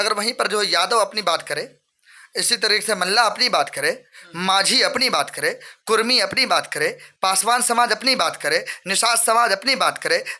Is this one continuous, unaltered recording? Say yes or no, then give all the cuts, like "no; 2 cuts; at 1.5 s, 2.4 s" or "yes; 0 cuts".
yes; 0 cuts